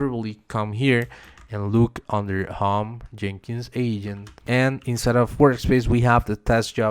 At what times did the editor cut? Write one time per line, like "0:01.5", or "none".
0:04.3